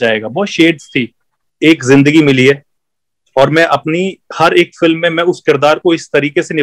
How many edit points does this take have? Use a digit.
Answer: 1